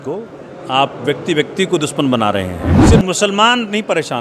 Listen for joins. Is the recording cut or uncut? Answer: cut